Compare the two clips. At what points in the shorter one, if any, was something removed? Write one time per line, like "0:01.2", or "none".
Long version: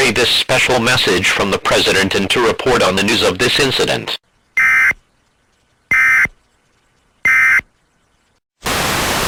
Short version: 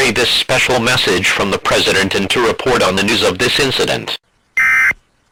none